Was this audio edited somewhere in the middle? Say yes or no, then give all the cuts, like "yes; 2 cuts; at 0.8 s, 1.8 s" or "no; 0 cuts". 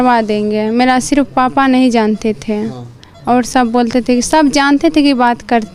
no; 0 cuts